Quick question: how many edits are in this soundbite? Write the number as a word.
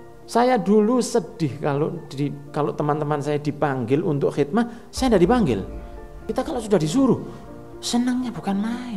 one